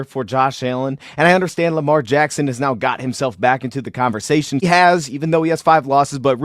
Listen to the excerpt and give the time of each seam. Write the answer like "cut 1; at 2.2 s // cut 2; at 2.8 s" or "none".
cut 1; at 4.6 s